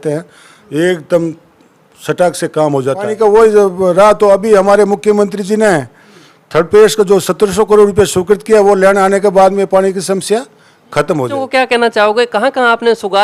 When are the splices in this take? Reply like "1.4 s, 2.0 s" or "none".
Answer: 3.1 s, 11.4 s